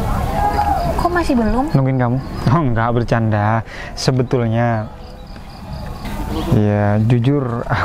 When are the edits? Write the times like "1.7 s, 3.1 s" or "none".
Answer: 6.0 s